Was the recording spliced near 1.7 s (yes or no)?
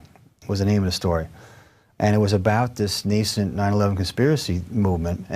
no